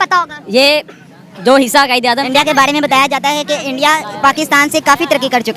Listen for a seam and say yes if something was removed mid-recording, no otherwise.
yes